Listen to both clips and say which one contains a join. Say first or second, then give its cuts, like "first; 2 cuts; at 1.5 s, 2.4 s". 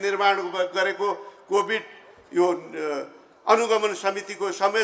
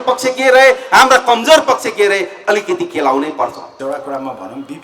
second; 1 cut; at 3.7 s